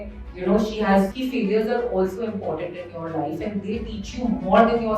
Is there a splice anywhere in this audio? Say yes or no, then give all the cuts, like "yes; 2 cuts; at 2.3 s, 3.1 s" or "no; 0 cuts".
yes; 1 cut; at 1.1 s